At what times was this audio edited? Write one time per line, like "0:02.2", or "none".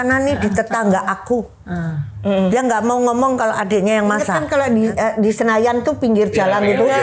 0:04.4